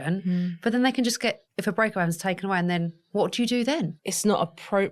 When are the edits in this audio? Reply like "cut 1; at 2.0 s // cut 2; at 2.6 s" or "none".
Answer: cut 1; at 1.5 s // cut 2; at 3.0 s // cut 3; at 3.9 s